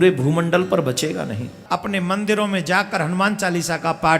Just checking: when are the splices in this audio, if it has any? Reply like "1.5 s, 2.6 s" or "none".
1.5 s